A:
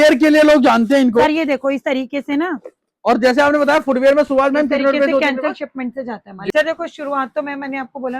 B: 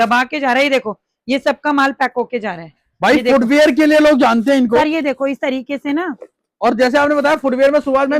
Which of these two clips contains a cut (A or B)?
A